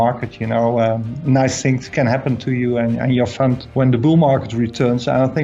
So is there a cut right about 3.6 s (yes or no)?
yes